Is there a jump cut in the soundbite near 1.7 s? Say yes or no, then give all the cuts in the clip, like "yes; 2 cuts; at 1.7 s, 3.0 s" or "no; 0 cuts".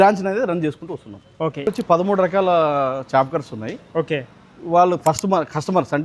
yes; 1 cut; at 1.7 s